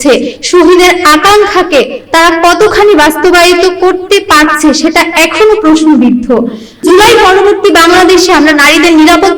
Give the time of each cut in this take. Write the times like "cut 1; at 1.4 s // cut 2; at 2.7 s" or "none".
cut 1; at 6.8 s